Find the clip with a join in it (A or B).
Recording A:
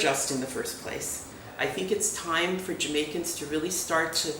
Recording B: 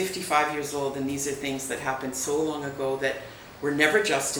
A